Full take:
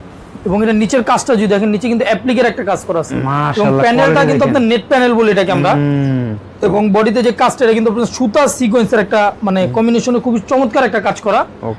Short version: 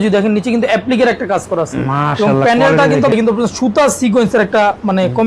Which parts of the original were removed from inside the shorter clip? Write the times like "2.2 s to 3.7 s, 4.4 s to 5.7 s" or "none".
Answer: 4.5 s to 7.7 s